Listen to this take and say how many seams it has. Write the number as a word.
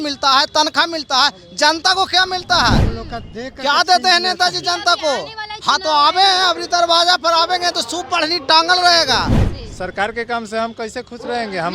one